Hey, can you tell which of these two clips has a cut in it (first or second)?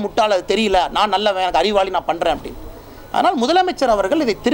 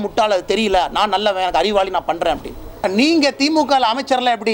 second